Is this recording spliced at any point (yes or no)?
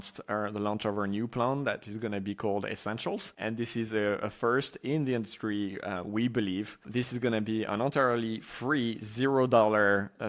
yes